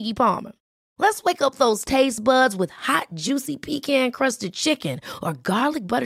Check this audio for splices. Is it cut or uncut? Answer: uncut